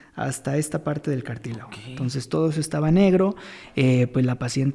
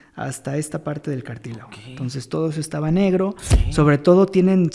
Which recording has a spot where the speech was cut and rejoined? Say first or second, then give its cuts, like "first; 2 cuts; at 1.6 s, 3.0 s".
second; 1 cut; at 3.5 s